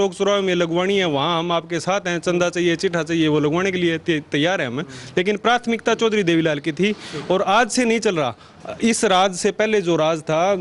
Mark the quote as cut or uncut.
uncut